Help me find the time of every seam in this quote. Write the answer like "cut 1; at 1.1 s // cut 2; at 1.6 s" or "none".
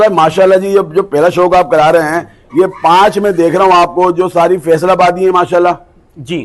none